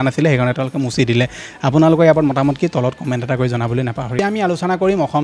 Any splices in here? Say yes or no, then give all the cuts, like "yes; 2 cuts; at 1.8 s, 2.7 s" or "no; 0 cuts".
no; 0 cuts